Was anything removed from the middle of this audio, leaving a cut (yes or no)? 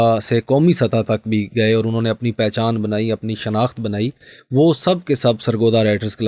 no